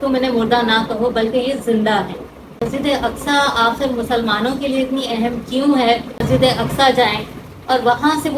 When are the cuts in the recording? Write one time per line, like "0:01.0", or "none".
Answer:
0:02.6
0:06.2